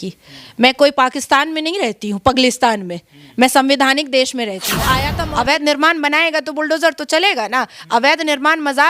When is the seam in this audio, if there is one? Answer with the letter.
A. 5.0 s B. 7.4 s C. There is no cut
A